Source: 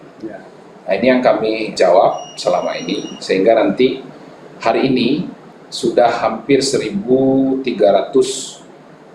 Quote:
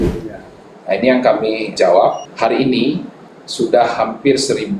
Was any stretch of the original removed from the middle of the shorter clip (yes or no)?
yes